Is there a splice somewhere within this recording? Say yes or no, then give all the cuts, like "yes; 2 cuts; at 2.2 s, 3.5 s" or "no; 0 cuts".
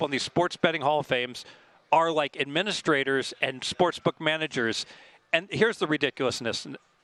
no; 0 cuts